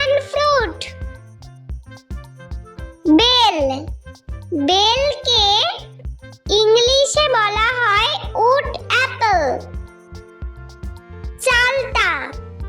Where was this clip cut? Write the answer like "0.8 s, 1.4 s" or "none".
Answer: 1.4 s, 3.0 s